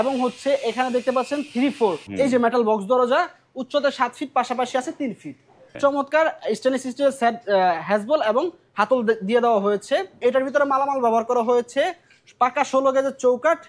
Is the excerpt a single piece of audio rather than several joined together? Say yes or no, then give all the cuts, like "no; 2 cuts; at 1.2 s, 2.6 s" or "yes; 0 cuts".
no; 3 cuts; at 2.0 s, 5.8 s, 10.2 s